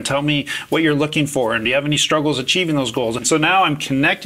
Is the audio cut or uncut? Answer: cut